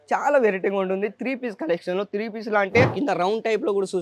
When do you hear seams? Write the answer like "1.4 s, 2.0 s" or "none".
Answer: 2.9 s